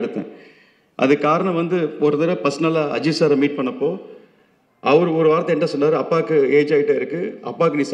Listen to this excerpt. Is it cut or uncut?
uncut